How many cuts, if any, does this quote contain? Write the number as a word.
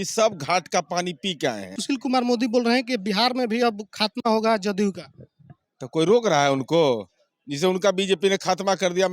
one